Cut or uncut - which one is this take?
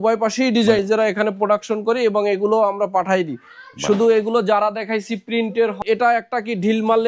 cut